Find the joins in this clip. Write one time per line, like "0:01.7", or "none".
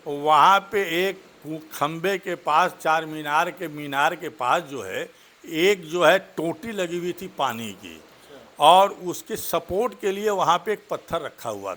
none